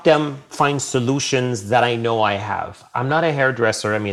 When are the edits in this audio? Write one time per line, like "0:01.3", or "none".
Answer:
none

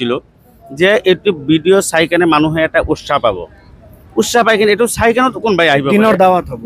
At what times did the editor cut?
none

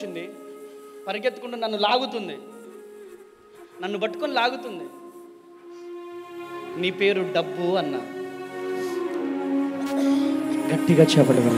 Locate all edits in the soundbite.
none

